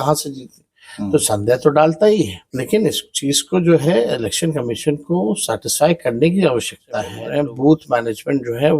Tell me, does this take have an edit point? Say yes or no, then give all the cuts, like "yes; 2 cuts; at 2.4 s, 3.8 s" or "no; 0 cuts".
yes; 2 cuts; at 2.4 s, 7.2 s